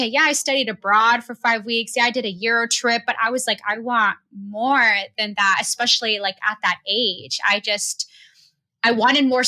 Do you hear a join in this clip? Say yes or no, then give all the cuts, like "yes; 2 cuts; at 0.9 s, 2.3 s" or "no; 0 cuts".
no; 0 cuts